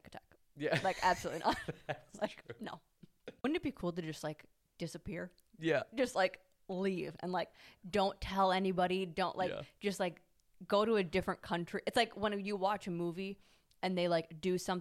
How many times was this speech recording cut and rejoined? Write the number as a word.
one